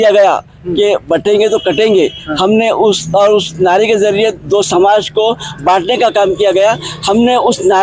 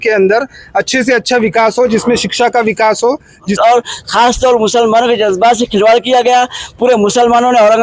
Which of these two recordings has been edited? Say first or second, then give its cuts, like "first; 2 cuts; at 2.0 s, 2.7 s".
second; 1 cut; at 3.5 s